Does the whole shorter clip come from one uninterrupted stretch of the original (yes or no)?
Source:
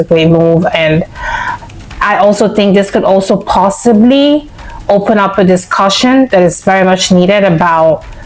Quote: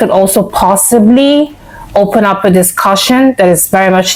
yes